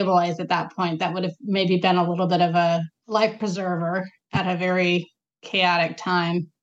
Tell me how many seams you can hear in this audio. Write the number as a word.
one